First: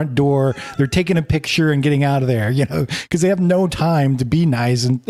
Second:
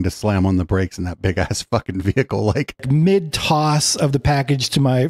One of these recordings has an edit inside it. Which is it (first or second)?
second